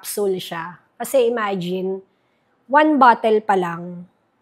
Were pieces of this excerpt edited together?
no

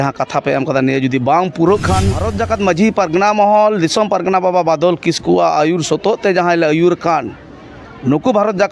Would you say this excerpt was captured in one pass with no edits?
no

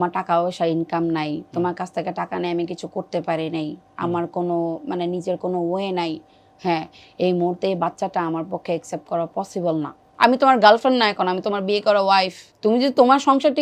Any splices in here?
yes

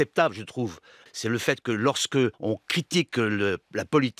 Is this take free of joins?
no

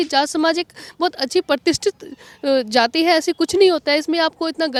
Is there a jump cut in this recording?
no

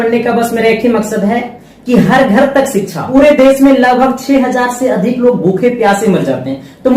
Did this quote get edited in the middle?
yes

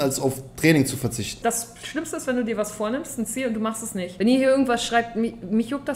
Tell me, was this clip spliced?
yes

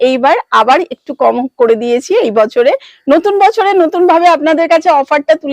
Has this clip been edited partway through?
no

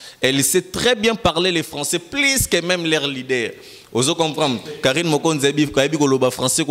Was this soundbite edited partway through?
no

